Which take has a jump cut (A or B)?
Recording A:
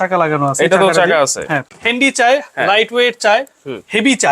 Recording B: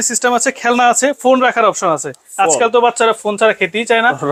A